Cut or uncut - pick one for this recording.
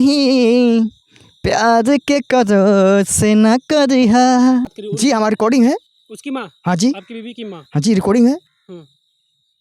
cut